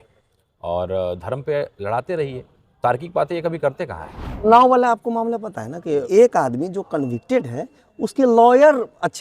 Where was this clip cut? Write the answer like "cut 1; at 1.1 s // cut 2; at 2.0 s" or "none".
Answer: cut 1; at 4.5 s // cut 2; at 6.0 s